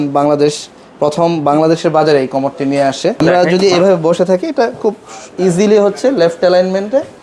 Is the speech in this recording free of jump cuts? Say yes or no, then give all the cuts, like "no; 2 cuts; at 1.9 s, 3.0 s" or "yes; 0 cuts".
no; 1 cut; at 3.2 s